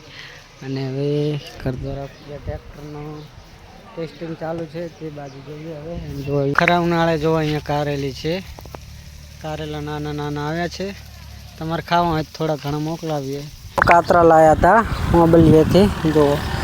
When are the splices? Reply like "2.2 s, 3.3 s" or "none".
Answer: 6.5 s, 13.8 s